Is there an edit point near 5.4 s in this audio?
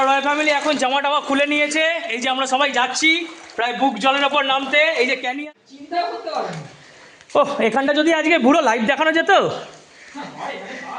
yes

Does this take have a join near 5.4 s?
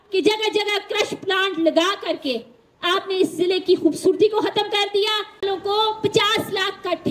yes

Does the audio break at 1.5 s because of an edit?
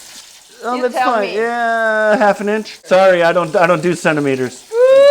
no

